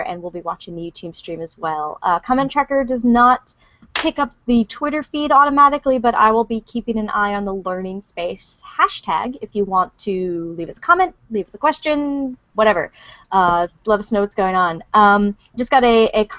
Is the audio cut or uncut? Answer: cut